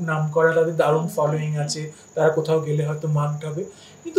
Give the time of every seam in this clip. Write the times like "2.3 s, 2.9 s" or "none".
none